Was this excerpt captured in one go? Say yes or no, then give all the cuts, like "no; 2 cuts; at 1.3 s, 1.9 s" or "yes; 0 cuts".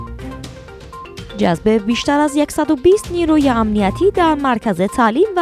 no; 1 cut; at 1.1 s